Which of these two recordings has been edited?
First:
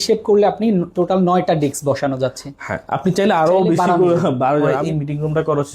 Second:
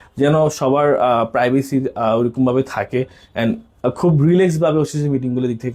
first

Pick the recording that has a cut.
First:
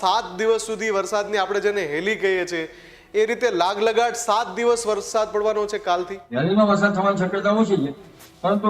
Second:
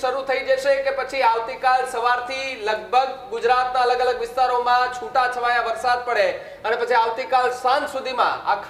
first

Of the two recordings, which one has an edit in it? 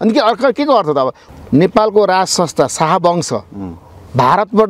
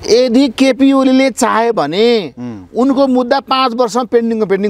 first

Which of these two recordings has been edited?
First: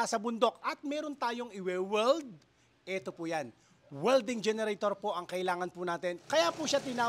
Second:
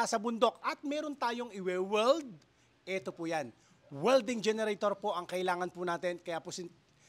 first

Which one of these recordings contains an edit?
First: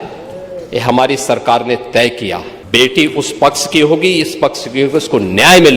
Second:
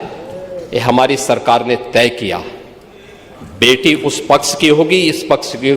first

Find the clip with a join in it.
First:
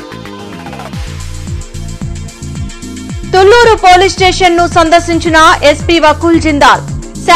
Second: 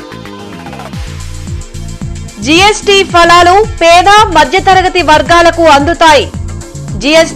first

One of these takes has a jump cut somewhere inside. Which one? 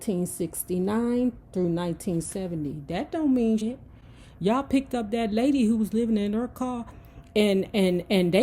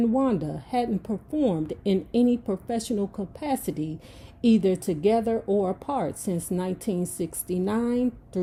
first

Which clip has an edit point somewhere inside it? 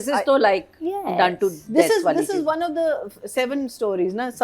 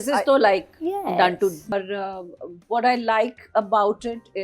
second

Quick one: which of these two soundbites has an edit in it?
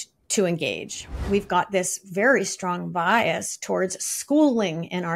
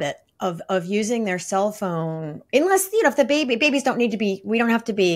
first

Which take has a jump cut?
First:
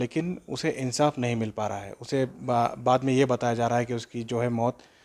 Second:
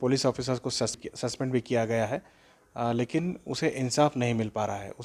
second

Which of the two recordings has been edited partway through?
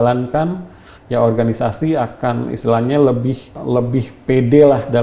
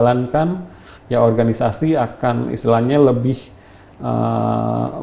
first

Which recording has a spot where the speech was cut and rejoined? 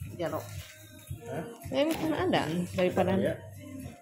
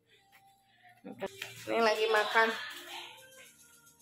second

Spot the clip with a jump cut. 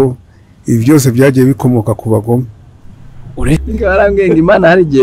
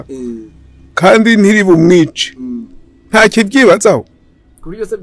first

